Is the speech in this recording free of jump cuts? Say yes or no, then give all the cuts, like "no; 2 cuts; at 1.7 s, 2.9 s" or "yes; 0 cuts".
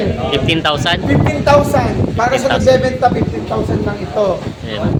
yes; 0 cuts